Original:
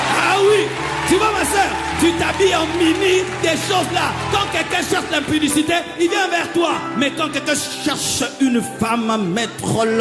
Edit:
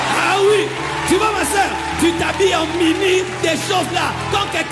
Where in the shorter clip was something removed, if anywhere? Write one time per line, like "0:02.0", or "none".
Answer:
none